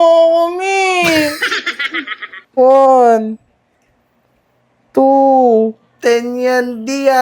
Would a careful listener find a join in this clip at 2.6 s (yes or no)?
yes